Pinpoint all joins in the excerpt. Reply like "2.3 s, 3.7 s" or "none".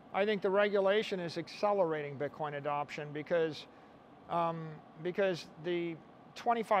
none